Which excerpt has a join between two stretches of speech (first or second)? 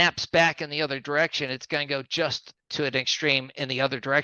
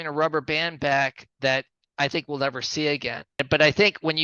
second